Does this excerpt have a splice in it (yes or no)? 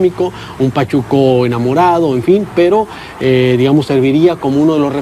yes